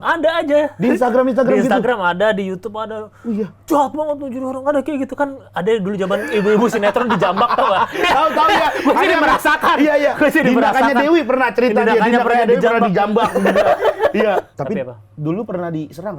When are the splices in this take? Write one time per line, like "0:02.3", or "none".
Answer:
0:14.6

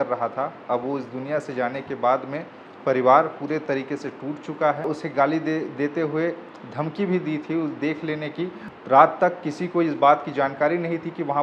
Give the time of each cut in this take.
0:04.9
0:08.6

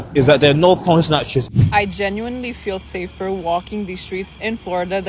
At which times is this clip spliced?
0:01.4

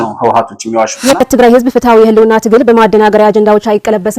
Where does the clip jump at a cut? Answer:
0:01.0

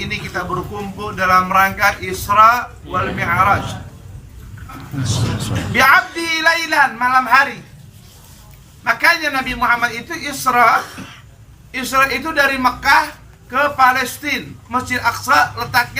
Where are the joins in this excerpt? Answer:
0:04.9

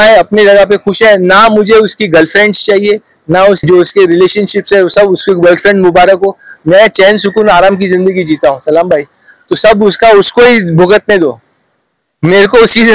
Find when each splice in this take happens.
0:03.6

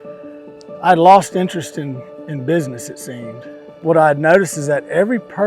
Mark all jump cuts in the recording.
0:03.8

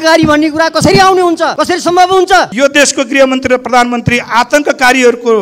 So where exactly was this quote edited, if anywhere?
0:01.6
0:02.5

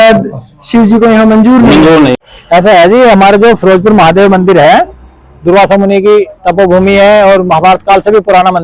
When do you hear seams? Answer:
0:02.2

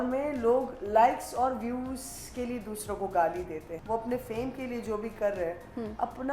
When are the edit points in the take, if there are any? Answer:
0:03.7

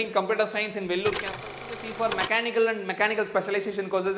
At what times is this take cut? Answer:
0:01.8

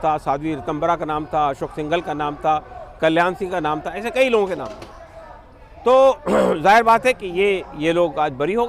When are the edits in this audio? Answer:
none

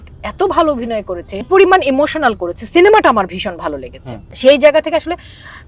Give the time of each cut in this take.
0:01.5
0:04.3

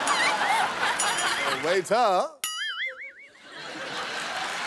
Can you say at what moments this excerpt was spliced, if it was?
0:01.6

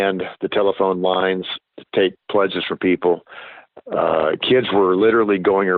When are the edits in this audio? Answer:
none

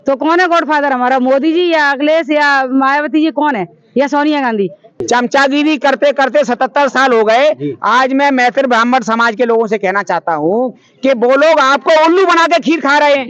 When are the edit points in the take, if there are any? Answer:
0:04.9

